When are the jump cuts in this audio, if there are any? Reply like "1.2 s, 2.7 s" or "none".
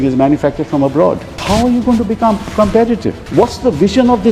1.3 s, 3.2 s